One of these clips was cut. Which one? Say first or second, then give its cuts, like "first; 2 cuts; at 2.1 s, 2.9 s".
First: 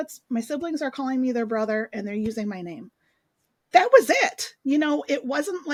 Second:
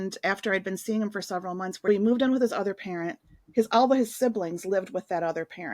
second; 1 cut; at 1.9 s